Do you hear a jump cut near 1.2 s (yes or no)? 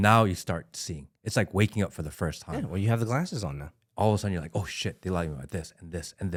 no